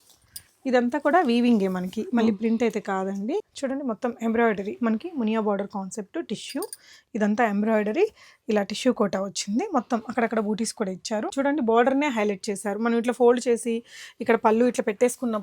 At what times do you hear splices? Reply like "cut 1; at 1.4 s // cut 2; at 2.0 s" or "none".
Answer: cut 1; at 3.5 s // cut 2; at 11.3 s